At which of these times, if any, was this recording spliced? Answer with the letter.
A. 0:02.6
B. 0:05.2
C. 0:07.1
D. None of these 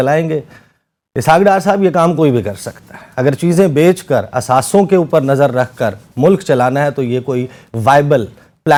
D